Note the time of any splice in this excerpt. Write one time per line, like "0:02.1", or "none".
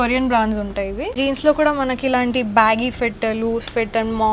0:01.1